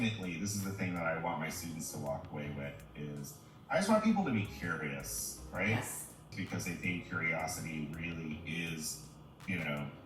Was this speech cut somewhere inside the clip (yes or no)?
yes